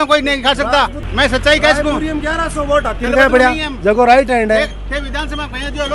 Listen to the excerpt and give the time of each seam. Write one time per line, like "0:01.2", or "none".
none

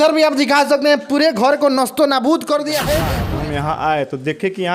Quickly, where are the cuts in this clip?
0:03.1

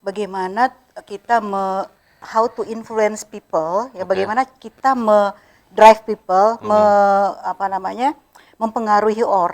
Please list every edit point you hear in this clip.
none

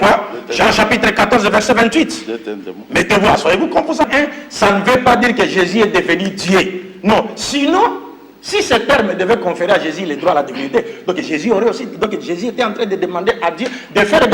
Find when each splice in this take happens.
0:04.1

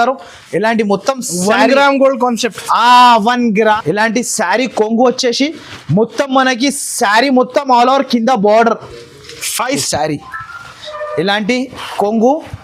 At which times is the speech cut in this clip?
0:03.8
0:09.8

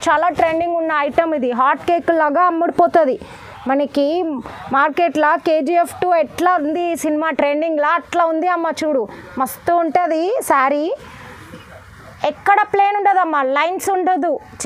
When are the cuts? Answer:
none

